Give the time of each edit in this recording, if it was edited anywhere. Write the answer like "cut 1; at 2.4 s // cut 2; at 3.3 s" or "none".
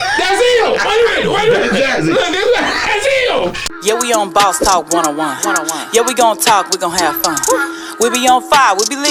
cut 1; at 3.7 s